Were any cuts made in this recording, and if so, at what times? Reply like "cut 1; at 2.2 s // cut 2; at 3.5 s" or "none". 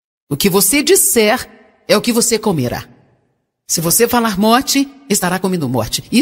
cut 1; at 3.8 s